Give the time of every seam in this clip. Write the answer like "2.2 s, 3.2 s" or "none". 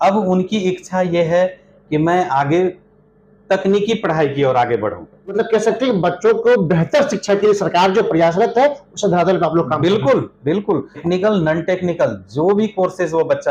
5.3 s, 11.0 s